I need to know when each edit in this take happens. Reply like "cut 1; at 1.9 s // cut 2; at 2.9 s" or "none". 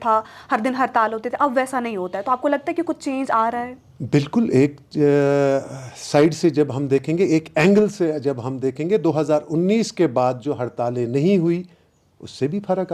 none